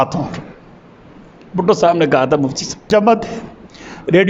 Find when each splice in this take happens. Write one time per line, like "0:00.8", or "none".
0:02.9